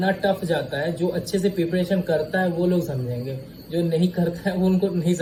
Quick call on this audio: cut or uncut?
uncut